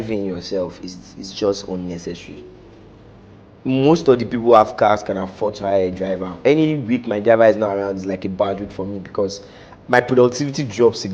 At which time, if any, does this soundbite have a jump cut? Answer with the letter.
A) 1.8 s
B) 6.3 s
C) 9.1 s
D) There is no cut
B